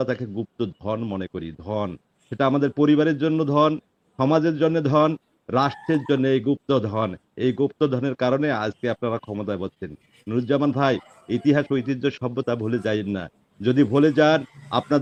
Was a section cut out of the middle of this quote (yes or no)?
no